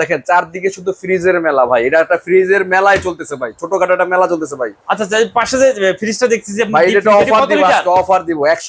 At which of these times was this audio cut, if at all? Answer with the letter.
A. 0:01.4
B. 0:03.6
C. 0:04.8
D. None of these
D